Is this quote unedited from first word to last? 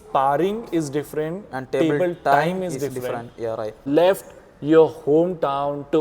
no; 1 cut; at 3.9 s

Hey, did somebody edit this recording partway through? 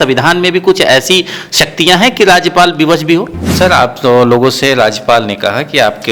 yes; 1 cut; at 3.5 s

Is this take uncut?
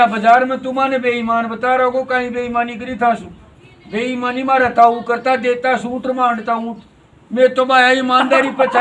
yes; 0 cuts

